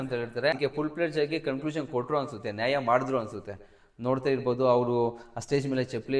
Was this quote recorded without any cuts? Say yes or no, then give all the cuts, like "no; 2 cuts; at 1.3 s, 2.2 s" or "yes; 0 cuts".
yes; 0 cuts